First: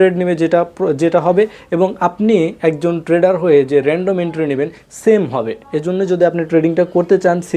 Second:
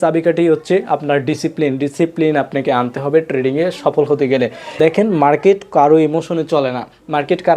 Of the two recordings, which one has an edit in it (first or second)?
second